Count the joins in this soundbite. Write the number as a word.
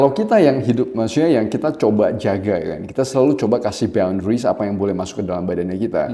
zero